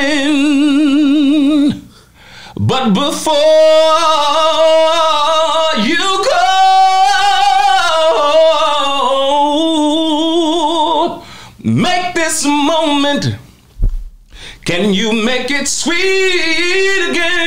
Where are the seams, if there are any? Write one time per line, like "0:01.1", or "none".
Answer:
none